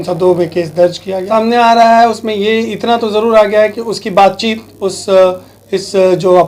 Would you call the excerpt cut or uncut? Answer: cut